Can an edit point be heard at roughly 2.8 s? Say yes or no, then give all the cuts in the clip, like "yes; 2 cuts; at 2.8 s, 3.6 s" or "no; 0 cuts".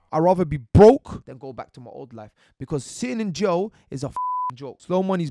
no; 2 cuts; at 1.2 s, 4.1 s